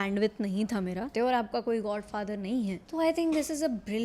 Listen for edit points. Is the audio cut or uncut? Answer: cut